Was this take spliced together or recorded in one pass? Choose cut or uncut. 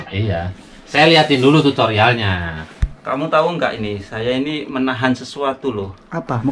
uncut